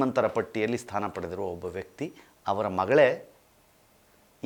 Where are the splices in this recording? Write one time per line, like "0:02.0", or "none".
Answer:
none

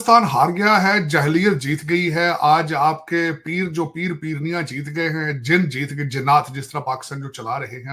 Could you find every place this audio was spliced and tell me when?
none

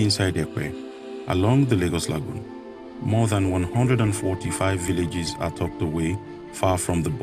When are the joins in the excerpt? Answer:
none

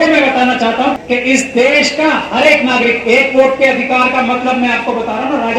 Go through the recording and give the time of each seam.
0:01.0

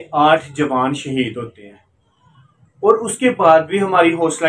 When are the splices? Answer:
none

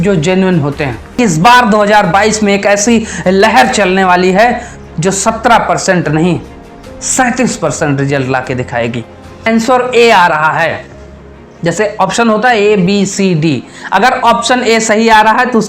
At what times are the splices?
0:01.2
0:09.4

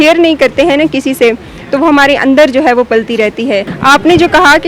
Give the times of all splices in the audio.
0:03.7

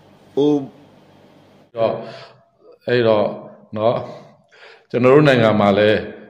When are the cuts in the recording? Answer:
0:01.8

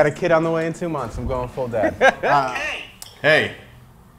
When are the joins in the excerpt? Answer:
0:02.5

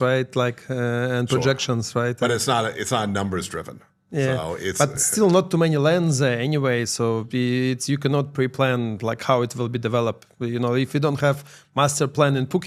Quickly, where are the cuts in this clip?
none

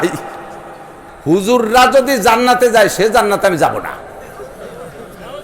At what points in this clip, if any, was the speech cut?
0:01.1

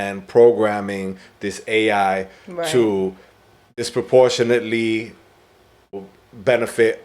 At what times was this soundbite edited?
0:03.7
0:06.0

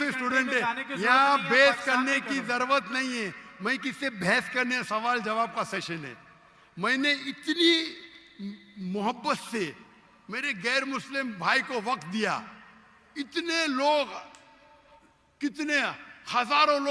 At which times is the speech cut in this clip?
none

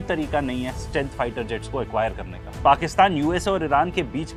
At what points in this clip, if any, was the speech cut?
none

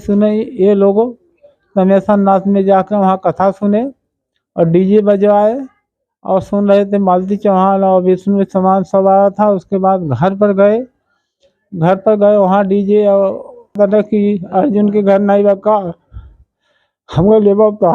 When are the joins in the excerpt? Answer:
0:13.8

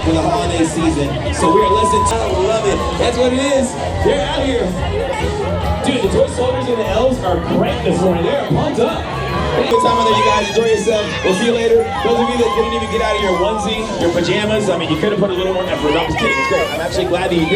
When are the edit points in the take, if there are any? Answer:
0:02.1
0:09.7

